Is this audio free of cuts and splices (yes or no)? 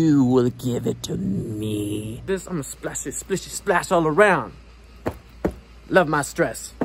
no